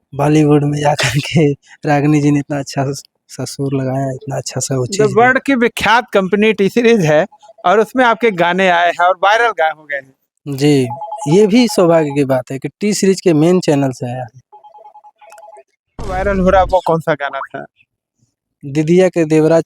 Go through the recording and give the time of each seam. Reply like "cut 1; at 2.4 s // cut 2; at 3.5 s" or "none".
cut 1; at 16.1 s